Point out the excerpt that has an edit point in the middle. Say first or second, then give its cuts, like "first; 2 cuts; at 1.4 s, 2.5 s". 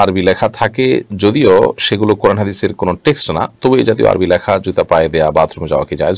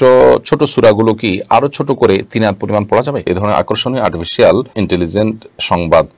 second; 2 cuts; at 3.3 s, 4.7 s